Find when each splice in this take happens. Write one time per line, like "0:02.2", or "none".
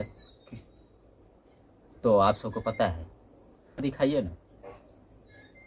0:03.8